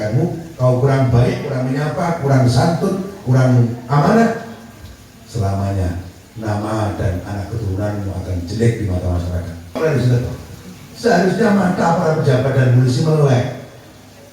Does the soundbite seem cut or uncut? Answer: cut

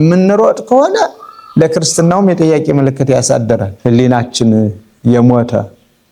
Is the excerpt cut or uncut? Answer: cut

